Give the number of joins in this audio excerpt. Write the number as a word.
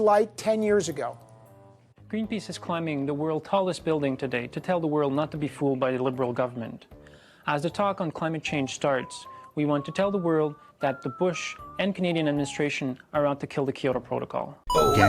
one